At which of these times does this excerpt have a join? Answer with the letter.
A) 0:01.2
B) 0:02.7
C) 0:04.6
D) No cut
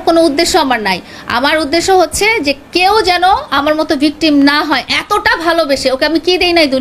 D